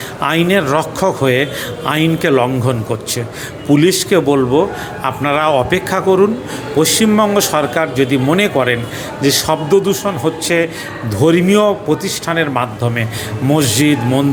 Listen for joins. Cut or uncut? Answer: uncut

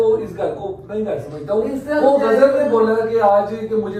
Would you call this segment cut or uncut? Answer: uncut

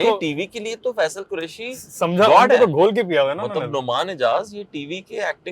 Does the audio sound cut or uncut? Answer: uncut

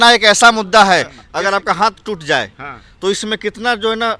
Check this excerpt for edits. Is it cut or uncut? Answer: cut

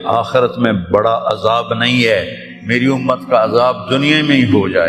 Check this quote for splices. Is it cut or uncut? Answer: uncut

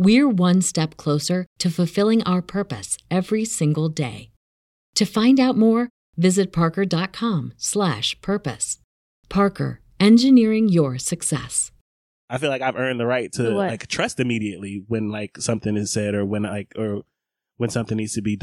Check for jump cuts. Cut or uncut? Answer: cut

